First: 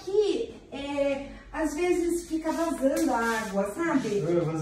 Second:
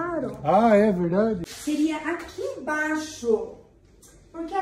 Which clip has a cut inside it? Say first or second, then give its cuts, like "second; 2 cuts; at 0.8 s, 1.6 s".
second; 1 cut; at 1.5 s